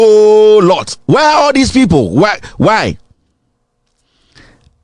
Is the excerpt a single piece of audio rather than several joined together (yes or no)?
yes